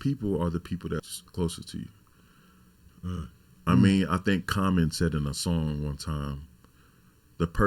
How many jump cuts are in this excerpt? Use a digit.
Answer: 1